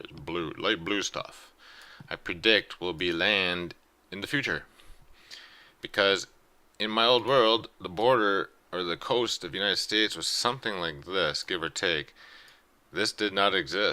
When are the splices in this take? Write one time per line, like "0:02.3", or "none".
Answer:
0:03.1